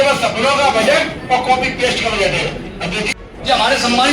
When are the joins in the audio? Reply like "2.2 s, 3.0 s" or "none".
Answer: 3.1 s